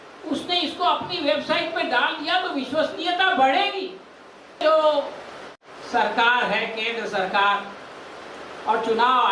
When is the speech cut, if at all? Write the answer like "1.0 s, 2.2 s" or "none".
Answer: 4.6 s